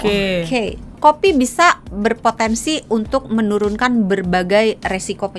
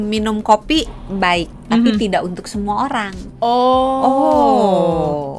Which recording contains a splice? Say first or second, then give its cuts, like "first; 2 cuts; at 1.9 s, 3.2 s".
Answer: first; 1 cut; at 1.0 s